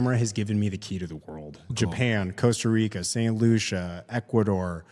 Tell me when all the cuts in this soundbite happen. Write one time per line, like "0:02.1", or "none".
0:01.7